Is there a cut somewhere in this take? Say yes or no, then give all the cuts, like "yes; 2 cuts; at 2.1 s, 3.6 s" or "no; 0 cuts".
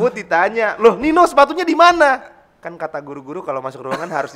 no; 0 cuts